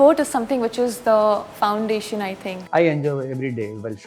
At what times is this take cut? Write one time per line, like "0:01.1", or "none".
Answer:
0:02.6

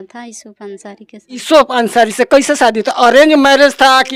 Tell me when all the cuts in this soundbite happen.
none

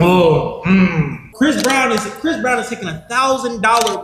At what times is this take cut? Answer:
0:01.2

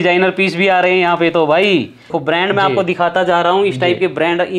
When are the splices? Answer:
0:02.2

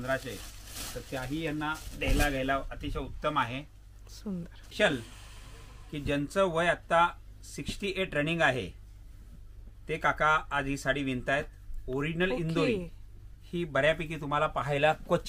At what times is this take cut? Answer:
0:04.7

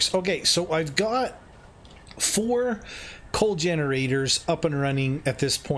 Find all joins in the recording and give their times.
none

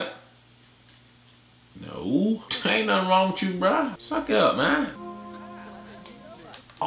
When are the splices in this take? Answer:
0:01.8
0:02.5
0:04.0
0:04.9

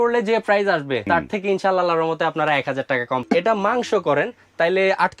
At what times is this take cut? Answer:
0:01.0
0:03.2

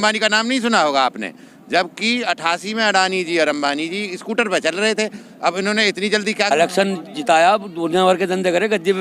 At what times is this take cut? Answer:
0:06.5

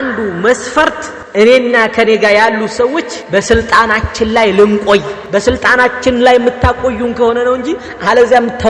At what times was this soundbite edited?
0:01.1
0:03.2
0:05.2

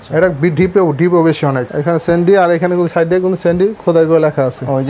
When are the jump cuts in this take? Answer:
0:01.7

